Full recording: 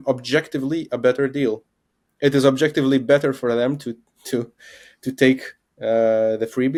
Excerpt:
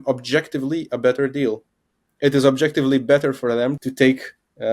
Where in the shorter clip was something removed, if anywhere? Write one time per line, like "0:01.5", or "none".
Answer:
0:03.8